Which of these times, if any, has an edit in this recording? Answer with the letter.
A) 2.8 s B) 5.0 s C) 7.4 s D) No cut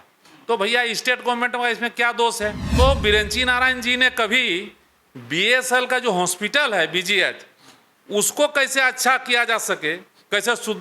A